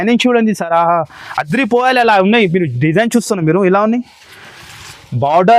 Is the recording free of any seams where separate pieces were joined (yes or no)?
yes